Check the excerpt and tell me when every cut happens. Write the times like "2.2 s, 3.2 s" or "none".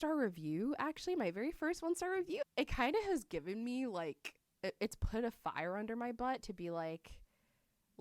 2.5 s